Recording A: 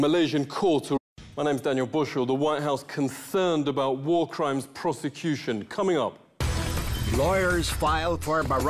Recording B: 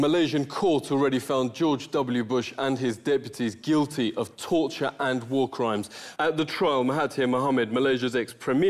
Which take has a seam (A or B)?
B